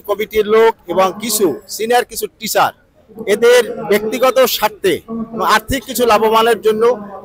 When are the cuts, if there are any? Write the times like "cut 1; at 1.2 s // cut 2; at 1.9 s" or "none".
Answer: none

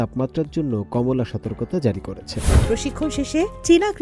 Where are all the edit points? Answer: cut 1; at 2.6 s

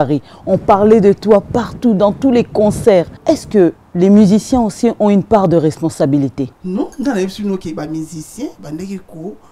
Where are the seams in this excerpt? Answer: cut 1; at 3.1 s // cut 2; at 6.6 s

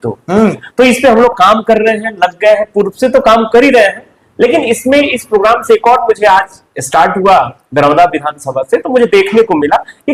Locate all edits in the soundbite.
none

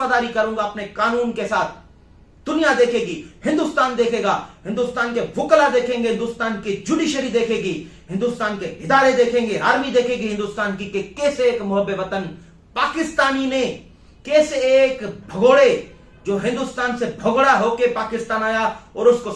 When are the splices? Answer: none

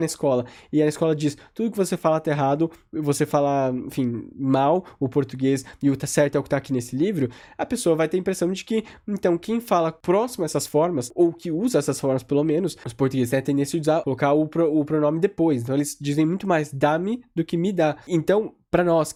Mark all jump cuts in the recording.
none

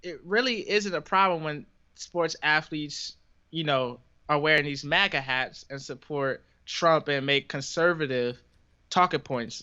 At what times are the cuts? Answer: none

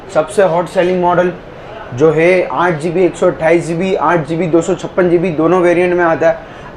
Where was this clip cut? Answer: none

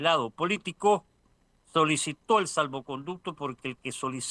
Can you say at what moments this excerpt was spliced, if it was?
none

